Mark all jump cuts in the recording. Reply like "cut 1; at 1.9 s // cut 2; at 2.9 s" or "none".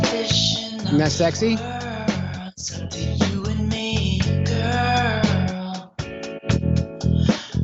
cut 1; at 2.1 s